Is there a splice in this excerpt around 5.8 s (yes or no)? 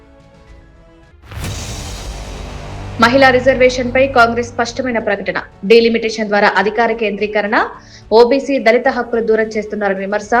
no